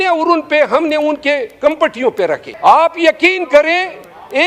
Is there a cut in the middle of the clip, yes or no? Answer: yes